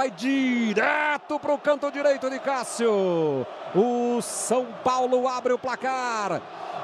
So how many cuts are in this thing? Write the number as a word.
zero